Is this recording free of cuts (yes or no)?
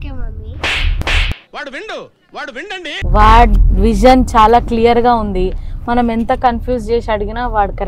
yes